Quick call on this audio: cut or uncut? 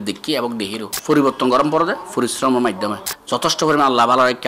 cut